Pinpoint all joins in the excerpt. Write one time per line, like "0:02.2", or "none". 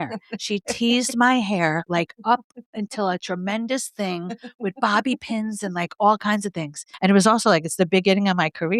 0:06.9